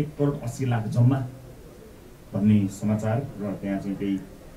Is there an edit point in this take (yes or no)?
no